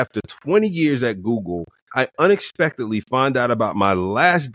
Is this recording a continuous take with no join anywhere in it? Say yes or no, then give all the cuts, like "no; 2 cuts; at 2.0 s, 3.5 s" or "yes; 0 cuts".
yes; 0 cuts